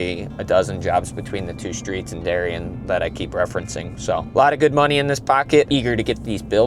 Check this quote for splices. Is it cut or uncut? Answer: cut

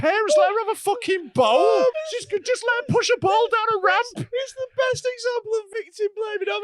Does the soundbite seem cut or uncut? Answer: cut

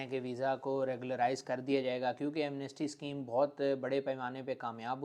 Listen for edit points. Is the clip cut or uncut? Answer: uncut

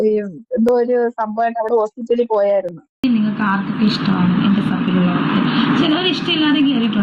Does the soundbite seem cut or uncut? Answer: cut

